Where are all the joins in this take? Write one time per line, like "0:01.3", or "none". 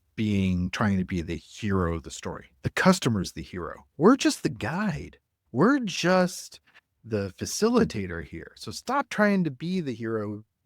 0:01.5